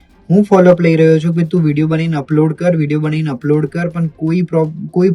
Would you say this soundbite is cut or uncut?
uncut